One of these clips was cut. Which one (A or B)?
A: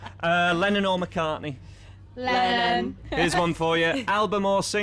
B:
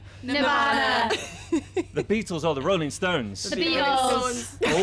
A